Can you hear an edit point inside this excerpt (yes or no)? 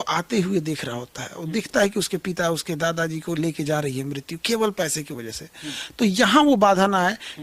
no